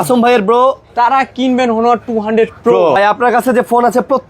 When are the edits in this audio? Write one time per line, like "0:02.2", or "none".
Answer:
0:02.9